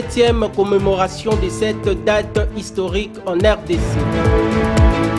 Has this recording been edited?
yes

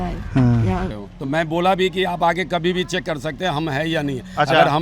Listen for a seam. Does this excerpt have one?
yes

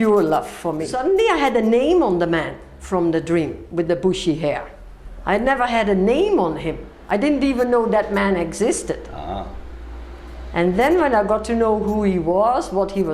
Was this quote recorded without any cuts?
no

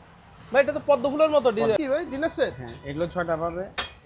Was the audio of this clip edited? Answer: yes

